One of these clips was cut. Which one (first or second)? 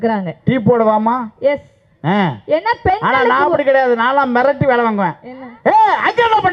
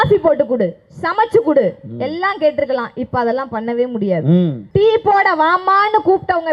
second